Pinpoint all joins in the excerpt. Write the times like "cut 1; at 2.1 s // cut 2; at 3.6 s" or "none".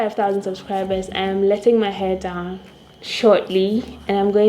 none

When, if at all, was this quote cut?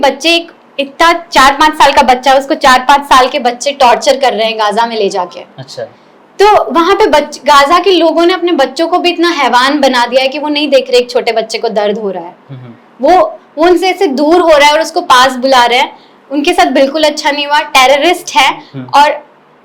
none

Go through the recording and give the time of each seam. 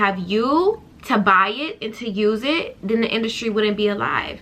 cut 1; at 0.9 s

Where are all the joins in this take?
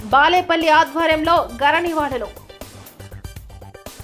none

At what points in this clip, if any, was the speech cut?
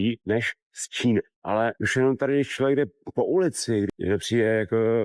cut 1; at 1.4 s

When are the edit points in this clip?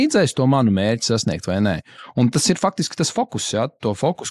none

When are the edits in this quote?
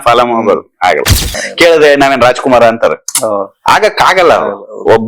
none

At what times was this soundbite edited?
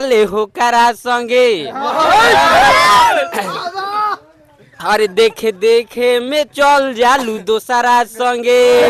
none

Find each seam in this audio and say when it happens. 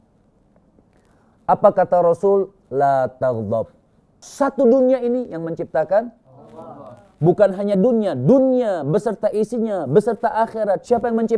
cut 1; at 4.3 s

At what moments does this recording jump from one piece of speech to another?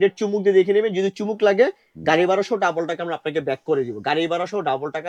none

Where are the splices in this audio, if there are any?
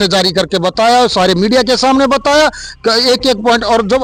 none

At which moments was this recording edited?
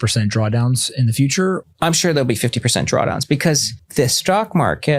cut 1; at 1.6 s // cut 2; at 3.8 s

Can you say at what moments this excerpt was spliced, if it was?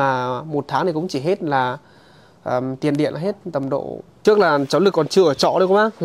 cut 1; at 4.0 s

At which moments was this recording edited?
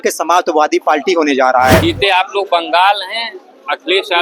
cut 1; at 1.8 s

